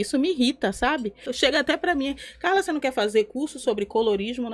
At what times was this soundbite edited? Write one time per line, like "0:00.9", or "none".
0:01.3